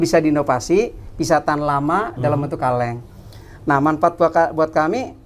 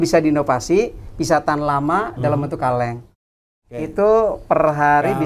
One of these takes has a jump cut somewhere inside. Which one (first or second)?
second